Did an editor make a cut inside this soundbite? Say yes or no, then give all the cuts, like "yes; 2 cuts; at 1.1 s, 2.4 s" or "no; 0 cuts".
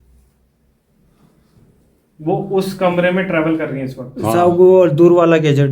no; 0 cuts